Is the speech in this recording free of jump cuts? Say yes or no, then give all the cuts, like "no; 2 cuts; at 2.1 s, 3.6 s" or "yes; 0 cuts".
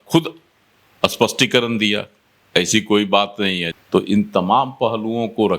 no; 1 cut; at 3.7 s